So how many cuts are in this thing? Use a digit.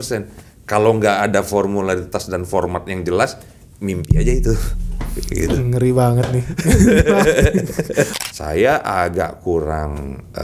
1